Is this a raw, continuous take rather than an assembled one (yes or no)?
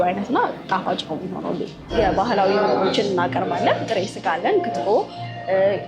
no